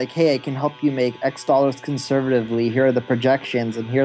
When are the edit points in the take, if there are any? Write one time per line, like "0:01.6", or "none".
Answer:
none